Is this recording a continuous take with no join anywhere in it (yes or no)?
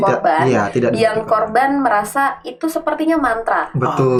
yes